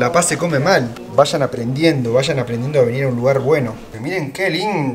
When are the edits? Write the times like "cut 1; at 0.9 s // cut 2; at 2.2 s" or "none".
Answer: cut 1; at 3.9 s